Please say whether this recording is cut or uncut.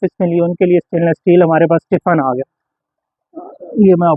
uncut